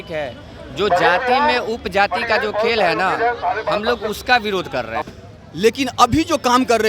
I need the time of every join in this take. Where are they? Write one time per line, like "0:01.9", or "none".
0:05.0